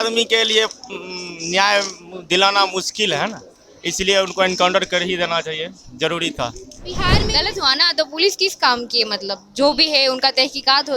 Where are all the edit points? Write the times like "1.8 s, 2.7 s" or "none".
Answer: 7.1 s